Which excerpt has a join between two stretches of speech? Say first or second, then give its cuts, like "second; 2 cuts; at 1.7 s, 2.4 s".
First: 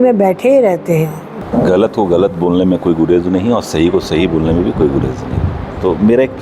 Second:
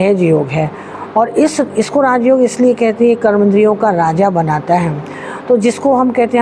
first; 1 cut; at 1.3 s